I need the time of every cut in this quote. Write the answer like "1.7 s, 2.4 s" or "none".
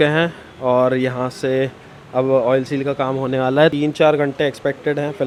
none

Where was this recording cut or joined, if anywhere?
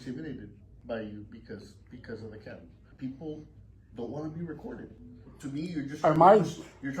2.9 s, 5.3 s

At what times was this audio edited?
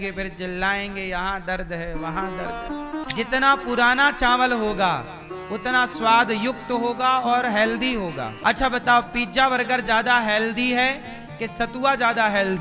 3.0 s, 8.3 s

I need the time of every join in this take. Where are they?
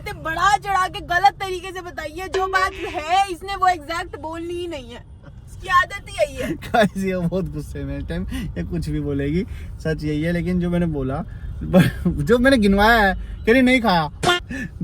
none

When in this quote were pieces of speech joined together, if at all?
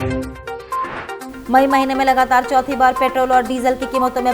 1.2 s

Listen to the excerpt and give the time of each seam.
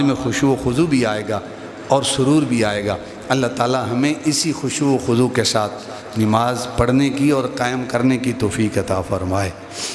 none

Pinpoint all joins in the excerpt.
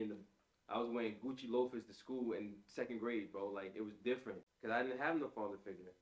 4.4 s

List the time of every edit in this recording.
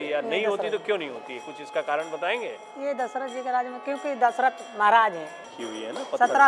5.4 s

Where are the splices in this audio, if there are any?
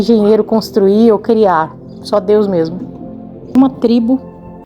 3.6 s

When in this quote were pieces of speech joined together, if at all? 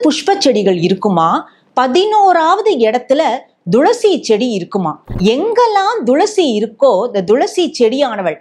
5.1 s

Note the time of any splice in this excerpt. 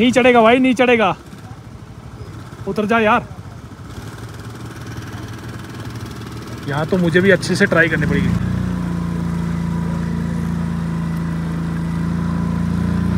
none

